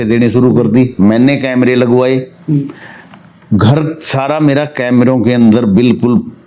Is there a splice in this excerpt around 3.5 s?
no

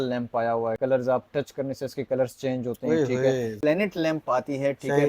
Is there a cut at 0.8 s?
yes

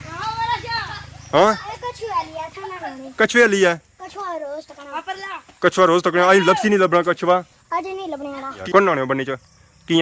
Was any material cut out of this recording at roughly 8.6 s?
yes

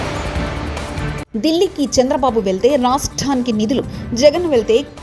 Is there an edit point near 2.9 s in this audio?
no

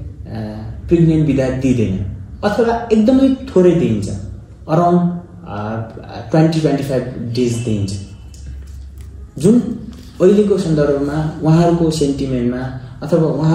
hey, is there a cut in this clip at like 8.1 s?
no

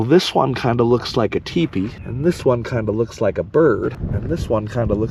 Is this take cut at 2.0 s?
yes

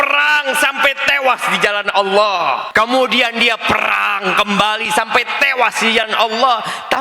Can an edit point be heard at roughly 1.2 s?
no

